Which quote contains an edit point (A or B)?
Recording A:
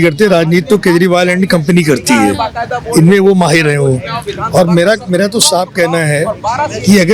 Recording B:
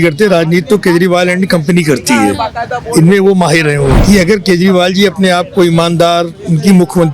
B